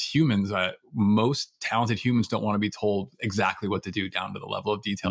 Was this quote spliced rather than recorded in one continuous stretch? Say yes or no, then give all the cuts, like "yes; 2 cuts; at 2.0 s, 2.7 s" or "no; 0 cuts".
no; 0 cuts